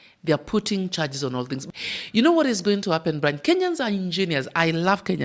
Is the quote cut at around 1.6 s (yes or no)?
yes